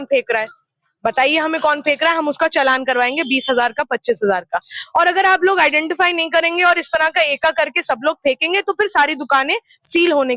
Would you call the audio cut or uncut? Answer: uncut